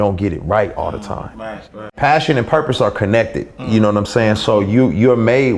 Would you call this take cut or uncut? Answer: cut